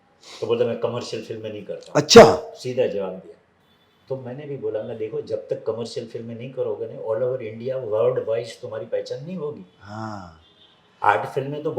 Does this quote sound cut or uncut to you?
uncut